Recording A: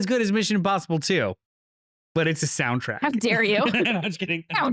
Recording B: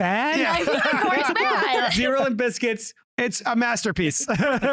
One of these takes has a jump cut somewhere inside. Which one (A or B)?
B